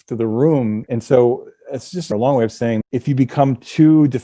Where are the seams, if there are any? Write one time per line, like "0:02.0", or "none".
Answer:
0:00.8
0:02.0
0:02.8